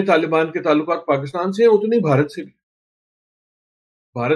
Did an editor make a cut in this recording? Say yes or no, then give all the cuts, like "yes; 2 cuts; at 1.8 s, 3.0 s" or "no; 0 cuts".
no; 0 cuts